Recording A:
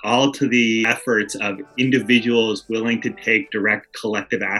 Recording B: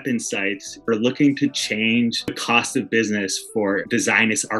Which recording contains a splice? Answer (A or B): B